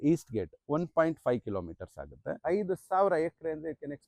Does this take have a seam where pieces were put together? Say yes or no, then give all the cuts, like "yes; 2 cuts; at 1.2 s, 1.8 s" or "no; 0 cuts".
yes; 1 cut; at 2.2 s